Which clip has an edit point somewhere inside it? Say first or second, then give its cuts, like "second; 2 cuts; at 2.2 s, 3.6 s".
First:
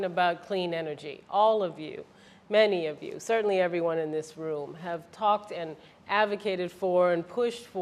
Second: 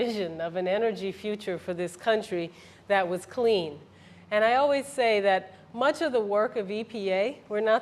first; 1 cut; at 6.7 s